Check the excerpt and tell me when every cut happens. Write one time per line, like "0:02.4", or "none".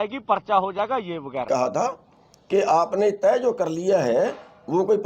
0:01.5